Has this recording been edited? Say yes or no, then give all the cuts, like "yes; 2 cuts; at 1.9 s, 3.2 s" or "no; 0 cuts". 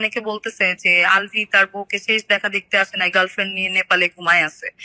no; 0 cuts